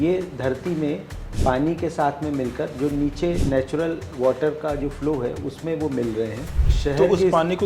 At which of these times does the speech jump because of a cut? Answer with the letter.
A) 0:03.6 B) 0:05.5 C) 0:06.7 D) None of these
C